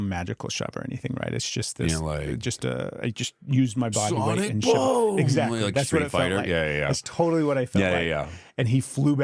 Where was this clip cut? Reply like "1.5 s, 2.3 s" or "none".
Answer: none